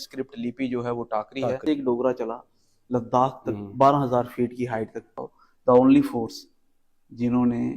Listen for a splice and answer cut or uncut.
cut